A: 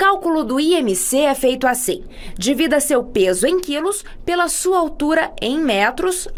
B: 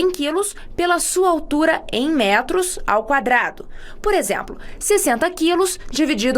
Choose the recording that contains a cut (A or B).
B